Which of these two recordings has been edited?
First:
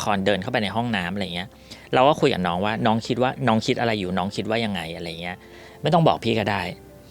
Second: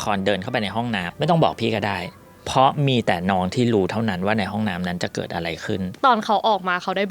second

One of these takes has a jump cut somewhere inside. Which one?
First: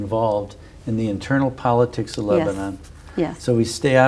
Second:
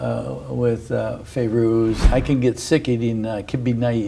second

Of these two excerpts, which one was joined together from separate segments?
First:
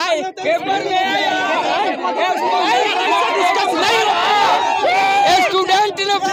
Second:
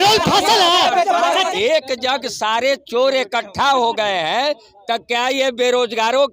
second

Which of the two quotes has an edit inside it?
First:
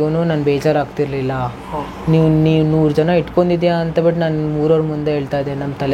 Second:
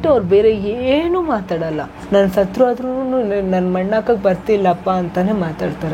second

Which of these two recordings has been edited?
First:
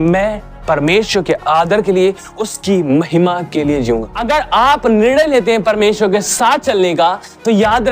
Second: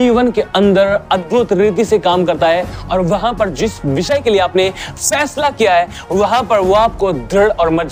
first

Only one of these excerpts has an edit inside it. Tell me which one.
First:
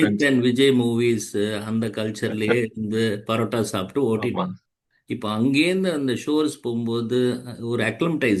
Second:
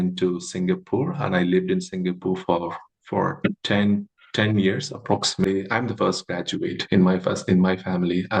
second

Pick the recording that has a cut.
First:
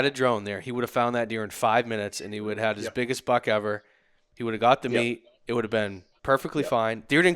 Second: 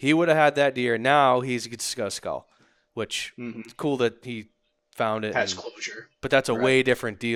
first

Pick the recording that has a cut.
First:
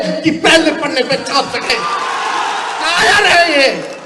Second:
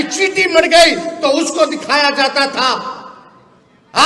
first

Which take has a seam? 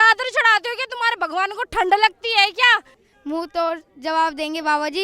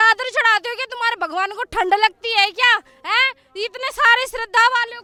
first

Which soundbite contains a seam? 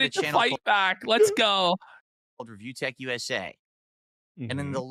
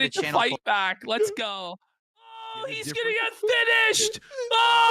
second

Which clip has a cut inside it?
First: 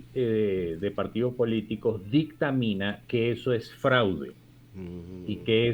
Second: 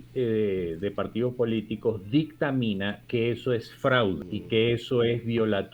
second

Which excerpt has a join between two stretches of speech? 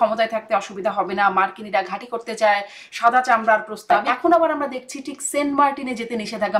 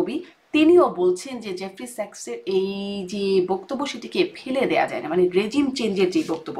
first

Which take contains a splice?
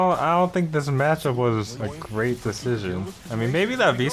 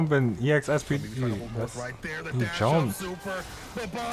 first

